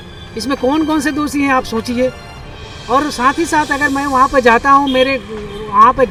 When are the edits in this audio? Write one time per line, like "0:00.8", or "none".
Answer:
none